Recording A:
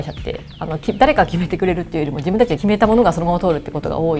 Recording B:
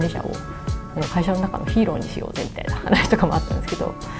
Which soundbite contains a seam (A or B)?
A